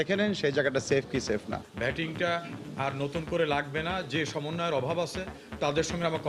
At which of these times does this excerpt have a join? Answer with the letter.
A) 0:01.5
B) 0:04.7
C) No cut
A